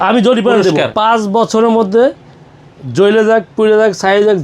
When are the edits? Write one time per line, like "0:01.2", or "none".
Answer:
0:00.9